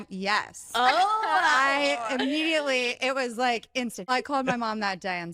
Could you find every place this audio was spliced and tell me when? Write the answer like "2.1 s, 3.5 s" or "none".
4.1 s